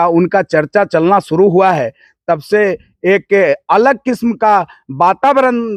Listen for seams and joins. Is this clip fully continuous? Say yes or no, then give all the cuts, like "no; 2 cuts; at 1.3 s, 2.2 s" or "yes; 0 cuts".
yes; 0 cuts